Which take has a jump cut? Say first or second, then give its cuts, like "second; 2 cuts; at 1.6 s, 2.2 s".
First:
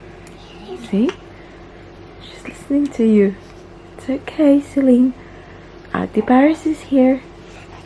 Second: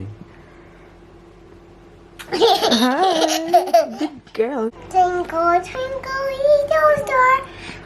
second; 1 cut; at 4.8 s